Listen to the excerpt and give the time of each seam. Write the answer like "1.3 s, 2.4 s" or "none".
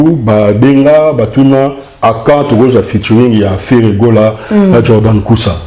none